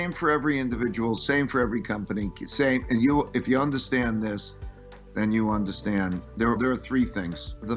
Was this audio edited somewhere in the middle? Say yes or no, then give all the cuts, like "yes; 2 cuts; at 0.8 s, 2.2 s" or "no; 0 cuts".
no; 0 cuts